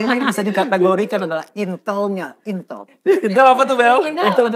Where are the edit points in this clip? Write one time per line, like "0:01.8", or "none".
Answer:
none